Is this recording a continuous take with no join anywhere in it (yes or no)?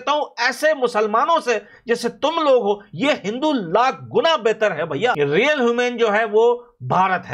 no